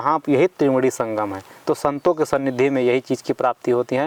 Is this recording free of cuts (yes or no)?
yes